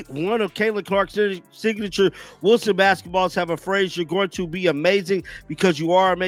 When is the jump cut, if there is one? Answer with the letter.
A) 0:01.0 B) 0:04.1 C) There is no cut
C